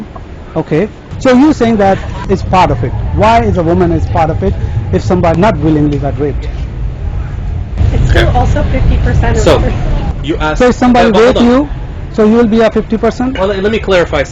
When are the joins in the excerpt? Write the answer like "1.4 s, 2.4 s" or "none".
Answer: 1.1 s, 2.2 s, 5.3 s

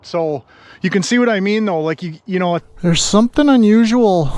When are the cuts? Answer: 2.7 s

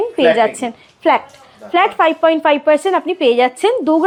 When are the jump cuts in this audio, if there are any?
none

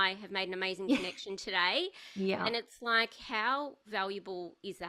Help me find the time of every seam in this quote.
none

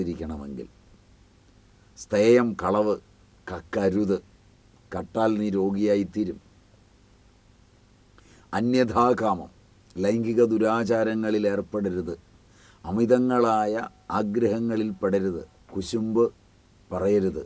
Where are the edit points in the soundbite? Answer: 15.5 s

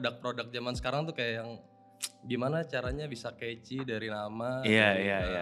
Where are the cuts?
none

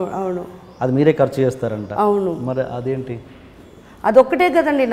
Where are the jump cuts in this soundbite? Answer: none

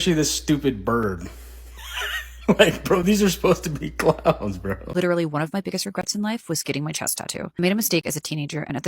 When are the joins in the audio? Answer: 4.8 s

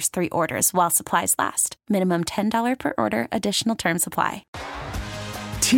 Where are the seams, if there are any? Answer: 4.5 s

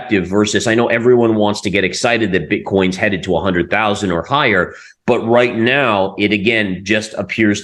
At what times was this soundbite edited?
none

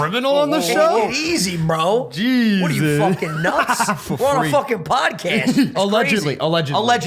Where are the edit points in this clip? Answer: 5.7 s

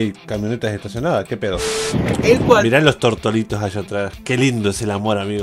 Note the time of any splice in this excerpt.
1.7 s

